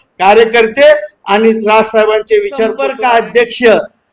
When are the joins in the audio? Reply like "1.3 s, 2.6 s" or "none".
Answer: 2.9 s